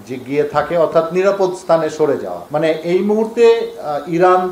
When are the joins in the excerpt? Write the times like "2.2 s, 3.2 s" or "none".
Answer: 2.4 s